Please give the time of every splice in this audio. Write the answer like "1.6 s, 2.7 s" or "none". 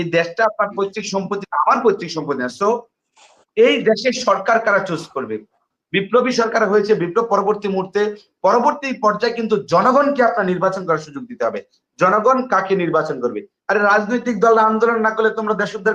none